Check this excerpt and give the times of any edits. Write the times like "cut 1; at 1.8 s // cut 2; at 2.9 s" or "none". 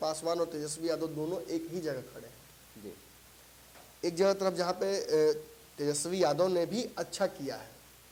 none